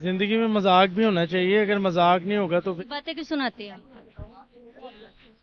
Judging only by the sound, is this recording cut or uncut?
cut